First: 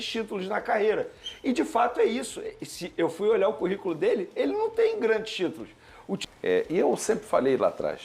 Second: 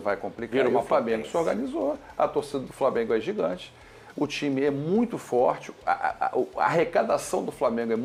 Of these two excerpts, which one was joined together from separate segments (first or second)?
first